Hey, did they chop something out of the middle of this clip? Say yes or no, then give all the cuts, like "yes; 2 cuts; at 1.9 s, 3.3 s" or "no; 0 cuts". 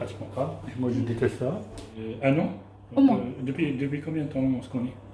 yes; 1 cut; at 1.8 s